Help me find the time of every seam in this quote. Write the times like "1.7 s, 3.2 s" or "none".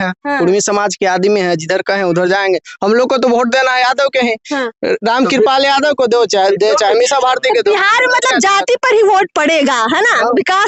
none